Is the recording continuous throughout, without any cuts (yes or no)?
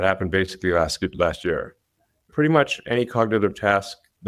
no